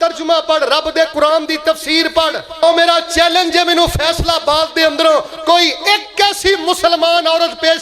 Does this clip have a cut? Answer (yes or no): yes